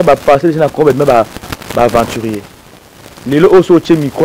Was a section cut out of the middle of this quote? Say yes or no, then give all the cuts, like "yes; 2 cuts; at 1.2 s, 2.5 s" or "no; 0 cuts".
no; 0 cuts